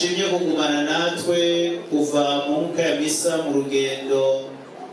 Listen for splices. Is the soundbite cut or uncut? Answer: uncut